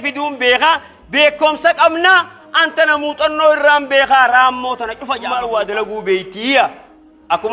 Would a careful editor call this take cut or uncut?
cut